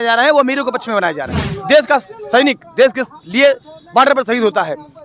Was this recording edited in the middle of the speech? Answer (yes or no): yes